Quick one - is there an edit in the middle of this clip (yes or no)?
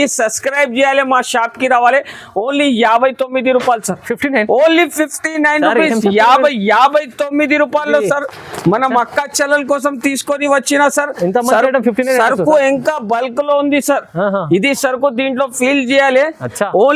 no